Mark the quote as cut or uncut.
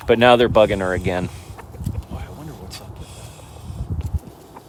uncut